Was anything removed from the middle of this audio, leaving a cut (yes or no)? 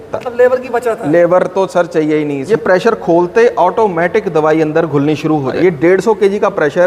yes